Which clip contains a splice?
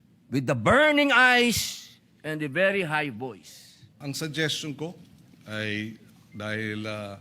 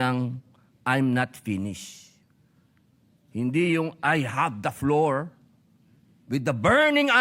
first; 1 cut; at 3.9 s

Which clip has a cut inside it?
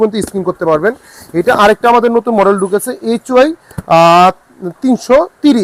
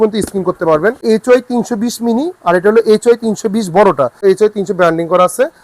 second; 2 cuts; at 1.0 s, 4.2 s

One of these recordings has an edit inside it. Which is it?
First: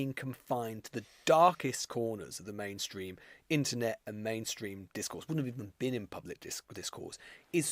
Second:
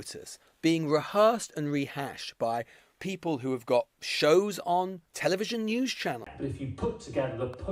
second; 1 cut; at 6.3 s

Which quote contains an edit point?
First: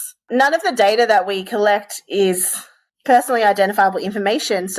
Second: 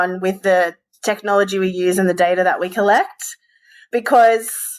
first; 1 cut; at 2.8 s

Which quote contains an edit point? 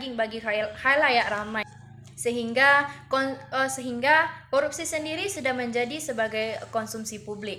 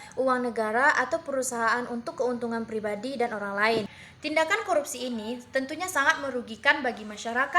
second; 1 cut; at 4.0 s

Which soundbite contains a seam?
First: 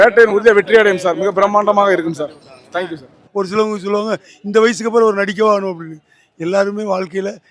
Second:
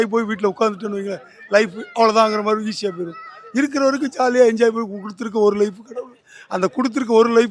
first; 1 cut; at 3.2 s

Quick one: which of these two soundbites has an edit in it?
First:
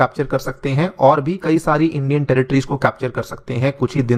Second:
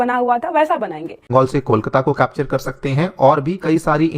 second; 1 cut; at 1.2 s

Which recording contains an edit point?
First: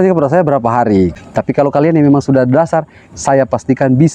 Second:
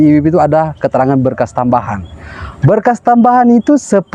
first; 1 cut; at 1.2 s

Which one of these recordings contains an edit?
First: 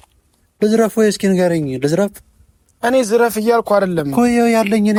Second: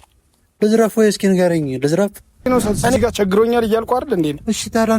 second; 1 cut; at 2.5 s

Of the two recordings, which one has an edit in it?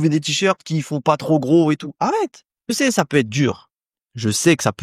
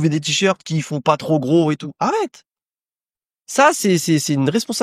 first; 1 cut; at 2.7 s

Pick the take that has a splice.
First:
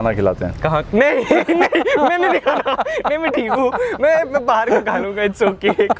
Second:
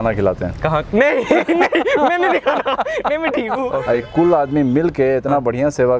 second; 1 cut; at 3.7 s

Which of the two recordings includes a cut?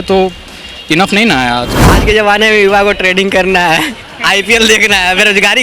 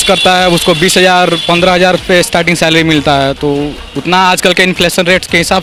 first; 1 cut; at 1.8 s

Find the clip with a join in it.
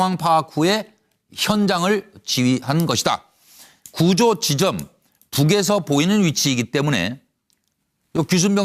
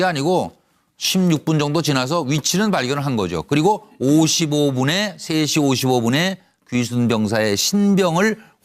first; 1 cut; at 5.2 s

